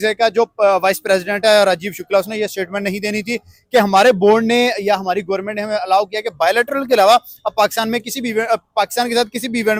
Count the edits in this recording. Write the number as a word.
zero